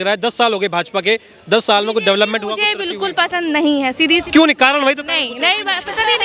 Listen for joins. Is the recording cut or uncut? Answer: uncut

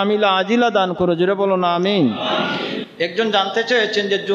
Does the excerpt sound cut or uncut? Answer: cut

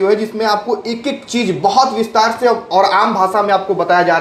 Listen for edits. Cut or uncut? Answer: uncut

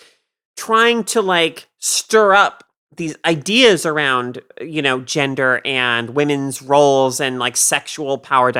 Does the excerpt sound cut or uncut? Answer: uncut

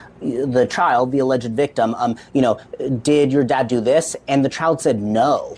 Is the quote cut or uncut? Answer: uncut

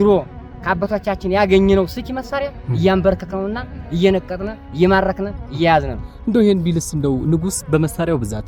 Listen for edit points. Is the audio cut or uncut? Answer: uncut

